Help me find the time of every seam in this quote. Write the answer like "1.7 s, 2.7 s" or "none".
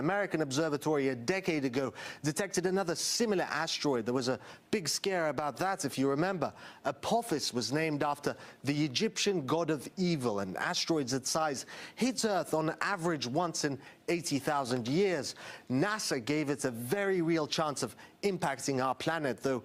none